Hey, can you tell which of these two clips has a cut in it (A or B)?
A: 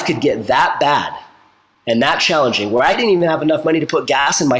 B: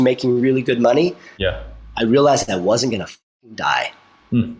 A